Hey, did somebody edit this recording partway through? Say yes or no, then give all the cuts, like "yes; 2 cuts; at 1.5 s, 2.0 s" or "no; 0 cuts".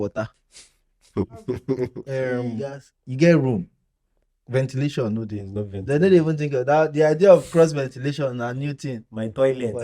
yes; 1 cut; at 2.4 s